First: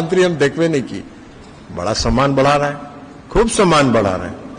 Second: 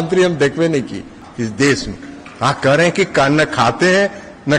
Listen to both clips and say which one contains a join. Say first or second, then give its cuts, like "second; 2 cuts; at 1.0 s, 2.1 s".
second; 1 cut; at 1.2 s